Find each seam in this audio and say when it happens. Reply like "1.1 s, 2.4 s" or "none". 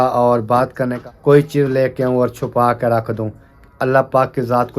1.0 s

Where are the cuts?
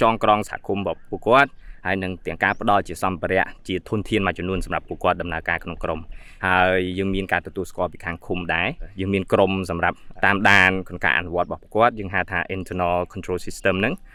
none

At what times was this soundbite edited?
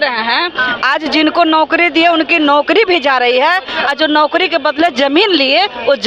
none

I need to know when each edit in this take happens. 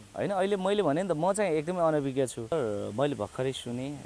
2.5 s

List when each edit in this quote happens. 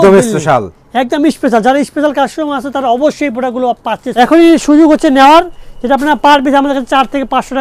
4.0 s

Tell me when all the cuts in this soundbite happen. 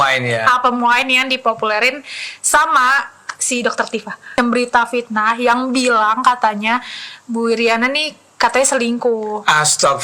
4.3 s

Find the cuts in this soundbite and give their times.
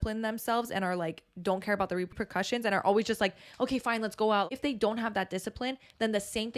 2.1 s, 4.5 s

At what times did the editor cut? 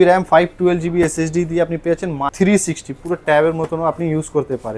2.3 s

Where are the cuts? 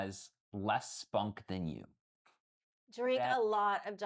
none

